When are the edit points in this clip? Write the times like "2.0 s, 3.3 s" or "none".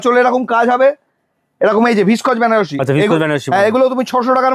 none